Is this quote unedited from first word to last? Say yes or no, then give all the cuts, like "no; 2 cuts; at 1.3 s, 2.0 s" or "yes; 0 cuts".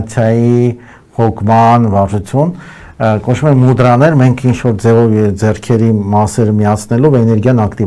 yes; 0 cuts